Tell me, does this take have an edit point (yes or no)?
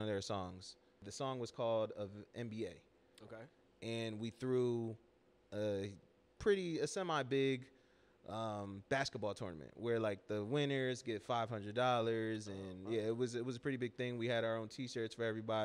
yes